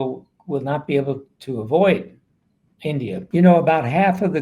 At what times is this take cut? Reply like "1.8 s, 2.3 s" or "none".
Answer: 3.2 s